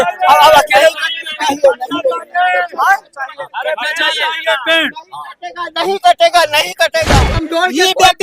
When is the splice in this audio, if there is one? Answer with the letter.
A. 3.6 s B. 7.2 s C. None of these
B